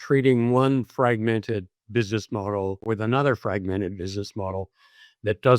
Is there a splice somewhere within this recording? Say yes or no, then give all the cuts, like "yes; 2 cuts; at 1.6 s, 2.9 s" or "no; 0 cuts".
yes; 1 cut; at 2.8 s